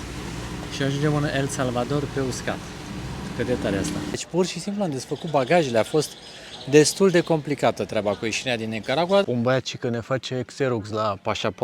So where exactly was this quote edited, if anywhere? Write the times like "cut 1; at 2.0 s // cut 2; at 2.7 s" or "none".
cut 1; at 4.2 s // cut 2; at 9.2 s